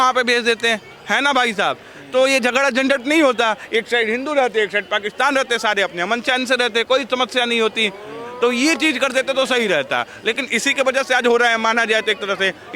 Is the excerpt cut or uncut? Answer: uncut